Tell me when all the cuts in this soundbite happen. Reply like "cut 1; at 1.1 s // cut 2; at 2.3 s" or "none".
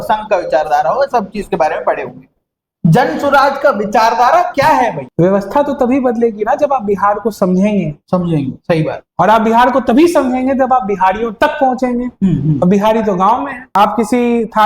cut 1; at 5.0 s // cut 2; at 13.7 s